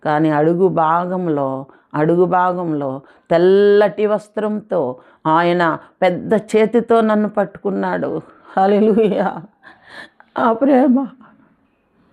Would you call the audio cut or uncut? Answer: uncut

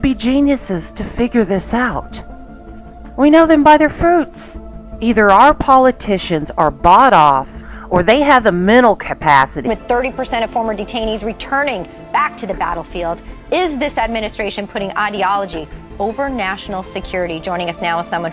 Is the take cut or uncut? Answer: uncut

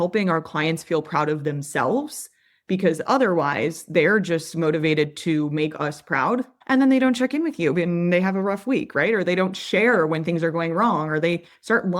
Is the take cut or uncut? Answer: cut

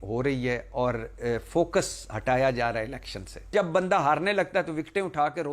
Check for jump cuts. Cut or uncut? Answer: cut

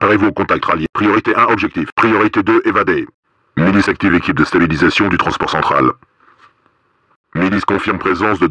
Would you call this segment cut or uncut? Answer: cut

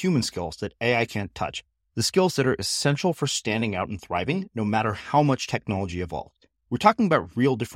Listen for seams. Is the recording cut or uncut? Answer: uncut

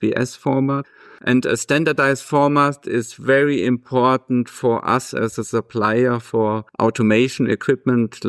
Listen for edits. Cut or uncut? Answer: uncut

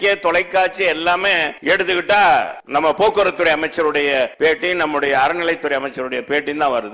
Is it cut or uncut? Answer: cut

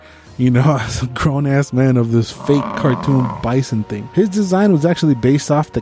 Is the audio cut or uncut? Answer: cut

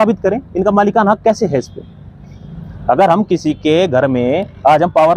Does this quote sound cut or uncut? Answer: uncut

